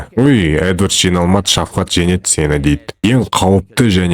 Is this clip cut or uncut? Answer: cut